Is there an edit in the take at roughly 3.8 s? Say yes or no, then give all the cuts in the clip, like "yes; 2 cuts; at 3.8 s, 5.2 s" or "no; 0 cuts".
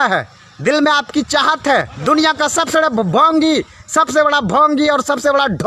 no; 1 cut; at 1.9 s